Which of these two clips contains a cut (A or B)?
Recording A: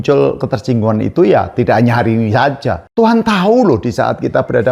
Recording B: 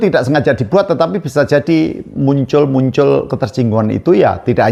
A